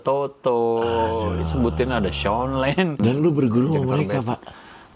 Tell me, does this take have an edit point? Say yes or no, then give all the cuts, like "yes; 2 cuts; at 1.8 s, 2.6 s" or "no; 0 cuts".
yes; 1 cut; at 3.0 s